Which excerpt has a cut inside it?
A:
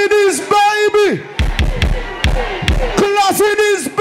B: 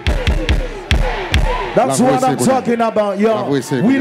A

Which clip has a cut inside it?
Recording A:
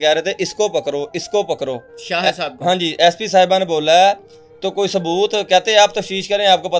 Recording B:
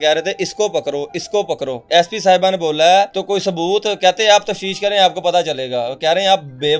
B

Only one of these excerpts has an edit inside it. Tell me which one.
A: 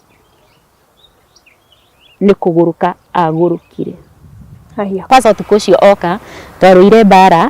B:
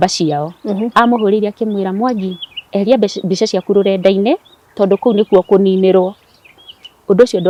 A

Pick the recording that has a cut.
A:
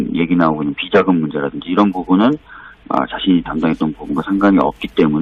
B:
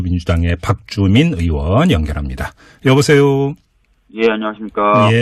B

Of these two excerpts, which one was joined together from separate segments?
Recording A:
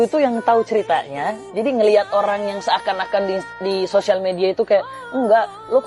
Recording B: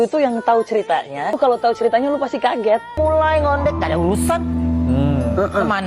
B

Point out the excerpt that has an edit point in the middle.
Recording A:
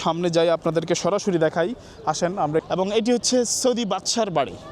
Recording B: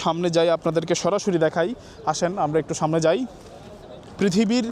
A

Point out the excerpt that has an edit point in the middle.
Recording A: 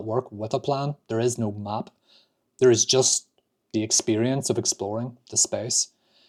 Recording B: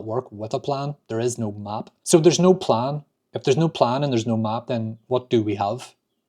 B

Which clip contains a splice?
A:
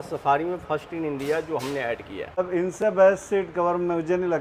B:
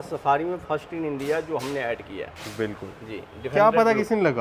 A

